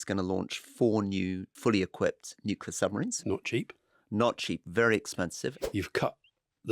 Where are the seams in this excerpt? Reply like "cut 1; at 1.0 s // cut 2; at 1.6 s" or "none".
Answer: cut 1; at 1.5 s // cut 2; at 3.2 s // cut 3; at 5.6 s